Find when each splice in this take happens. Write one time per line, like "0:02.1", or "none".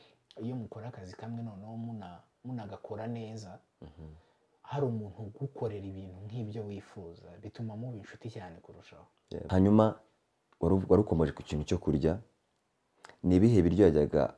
0:09.4